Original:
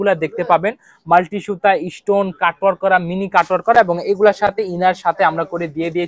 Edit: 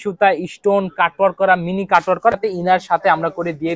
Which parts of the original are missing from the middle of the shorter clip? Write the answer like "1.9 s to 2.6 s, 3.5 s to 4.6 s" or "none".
3.7 s to 4.5 s